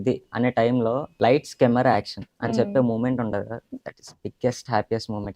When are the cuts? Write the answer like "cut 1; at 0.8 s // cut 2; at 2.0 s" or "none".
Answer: cut 1; at 1.1 s